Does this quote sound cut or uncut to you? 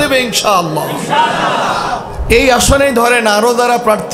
cut